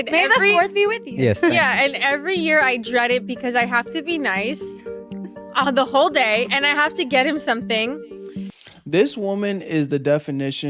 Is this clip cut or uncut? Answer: uncut